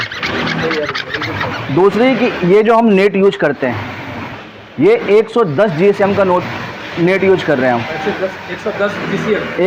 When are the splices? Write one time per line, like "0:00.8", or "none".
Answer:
none